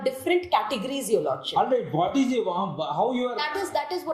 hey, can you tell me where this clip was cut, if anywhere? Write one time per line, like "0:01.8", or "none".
none

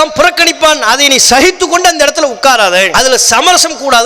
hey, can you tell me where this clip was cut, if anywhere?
0:02.9

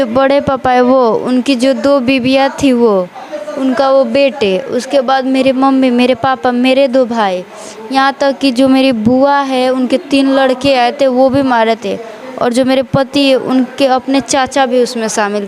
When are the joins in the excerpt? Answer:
none

